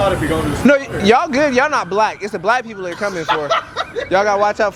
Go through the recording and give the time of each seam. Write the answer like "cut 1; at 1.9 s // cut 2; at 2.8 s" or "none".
none